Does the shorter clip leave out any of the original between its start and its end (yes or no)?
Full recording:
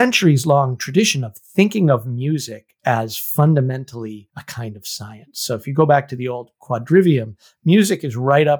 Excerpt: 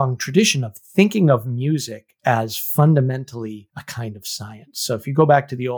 no